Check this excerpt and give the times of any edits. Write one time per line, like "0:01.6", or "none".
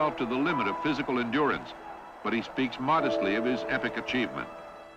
none